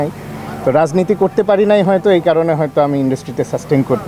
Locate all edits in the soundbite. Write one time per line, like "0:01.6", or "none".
none